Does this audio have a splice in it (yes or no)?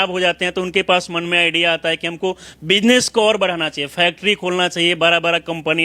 no